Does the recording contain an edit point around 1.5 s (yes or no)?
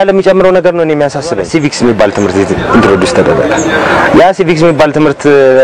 yes